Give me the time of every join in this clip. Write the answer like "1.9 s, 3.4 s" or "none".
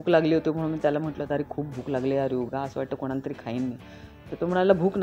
none